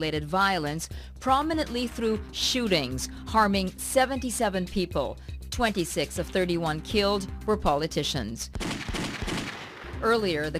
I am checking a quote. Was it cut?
yes; 1 cut; at 4.5 s

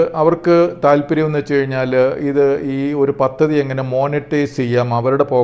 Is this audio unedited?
yes; 0 cuts

